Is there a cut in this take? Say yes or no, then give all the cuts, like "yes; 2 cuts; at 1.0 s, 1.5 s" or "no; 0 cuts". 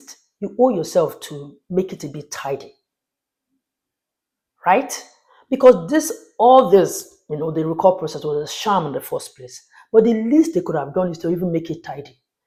no; 0 cuts